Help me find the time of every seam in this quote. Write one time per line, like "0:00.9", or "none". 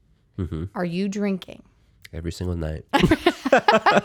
none

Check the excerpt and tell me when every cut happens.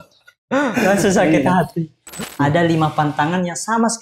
0:02.2

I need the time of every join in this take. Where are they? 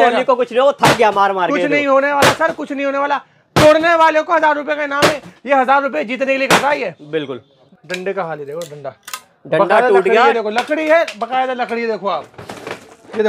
0:07.5

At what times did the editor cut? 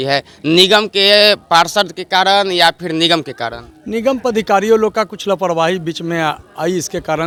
none

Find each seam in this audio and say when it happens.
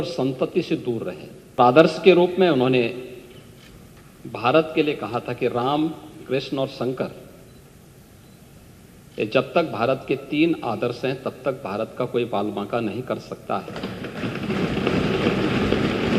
0:01.6

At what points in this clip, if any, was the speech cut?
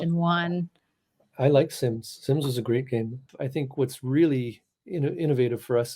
0:03.2

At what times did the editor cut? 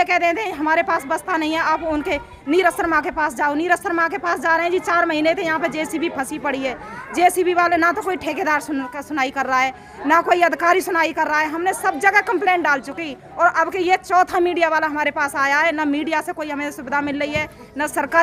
none

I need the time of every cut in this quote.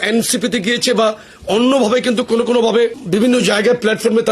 0:03.0

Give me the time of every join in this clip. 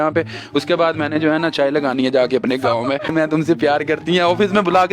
0:03.1

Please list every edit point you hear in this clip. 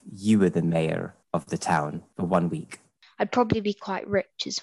0:01.2
0:02.0
0:03.0

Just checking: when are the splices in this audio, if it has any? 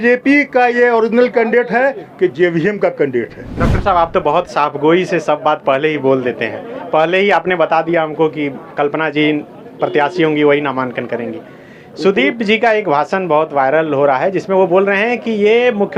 0:03.5

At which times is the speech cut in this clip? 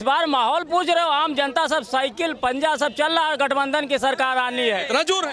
none

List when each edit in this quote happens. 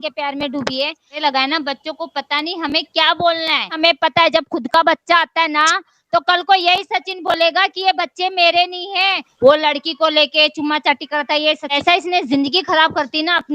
0:01.2
0:03.8
0:09.3
0:11.7

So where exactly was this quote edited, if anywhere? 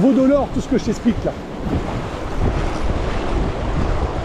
none

